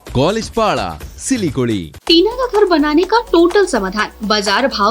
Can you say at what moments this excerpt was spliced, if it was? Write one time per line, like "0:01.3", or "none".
0:01.9